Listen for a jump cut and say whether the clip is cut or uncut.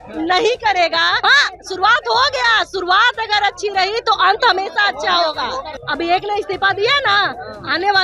cut